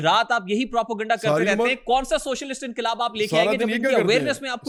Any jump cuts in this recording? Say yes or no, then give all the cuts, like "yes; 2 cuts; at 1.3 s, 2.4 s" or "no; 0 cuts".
no; 0 cuts